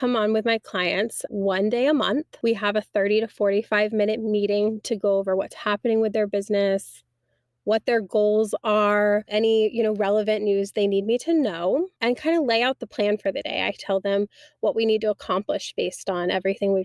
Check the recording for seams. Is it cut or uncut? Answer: cut